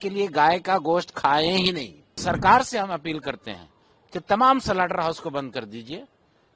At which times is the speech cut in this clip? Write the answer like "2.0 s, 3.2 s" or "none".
2.2 s